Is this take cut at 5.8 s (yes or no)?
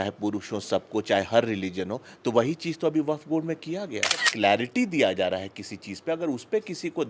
no